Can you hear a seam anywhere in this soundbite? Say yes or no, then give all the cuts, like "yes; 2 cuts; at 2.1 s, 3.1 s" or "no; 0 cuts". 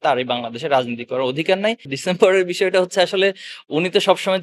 yes; 1 cut; at 1.9 s